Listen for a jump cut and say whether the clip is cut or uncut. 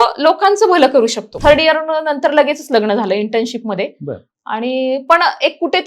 cut